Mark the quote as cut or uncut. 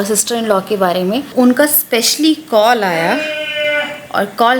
cut